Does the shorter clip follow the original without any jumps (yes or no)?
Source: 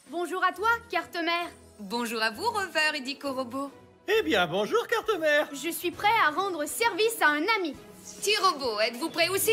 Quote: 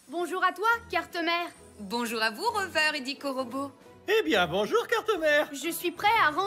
yes